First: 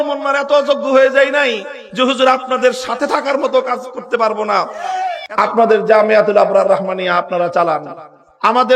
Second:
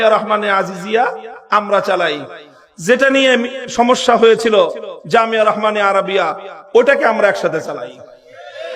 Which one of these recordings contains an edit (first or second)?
first